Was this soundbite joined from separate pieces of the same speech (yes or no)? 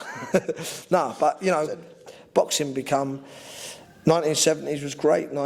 yes